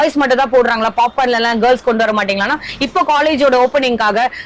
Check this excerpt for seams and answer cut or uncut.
uncut